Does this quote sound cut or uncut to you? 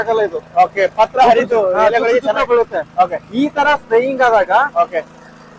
uncut